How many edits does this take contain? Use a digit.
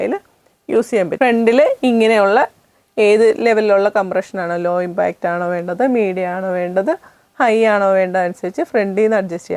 1